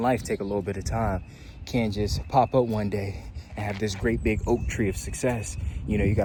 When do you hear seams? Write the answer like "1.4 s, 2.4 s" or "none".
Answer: none

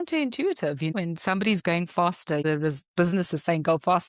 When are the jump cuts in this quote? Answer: 0.9 s, 2.4 s

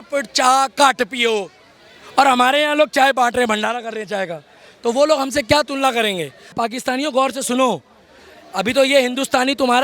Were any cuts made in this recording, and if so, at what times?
6.6 s

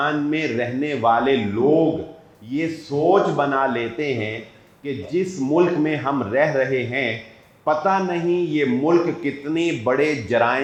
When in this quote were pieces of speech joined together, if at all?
none

